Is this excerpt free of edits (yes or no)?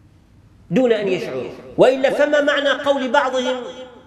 no